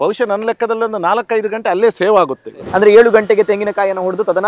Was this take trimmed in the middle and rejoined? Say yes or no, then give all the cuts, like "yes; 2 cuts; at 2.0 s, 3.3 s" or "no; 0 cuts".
yes; 1 cut; at 2.5 s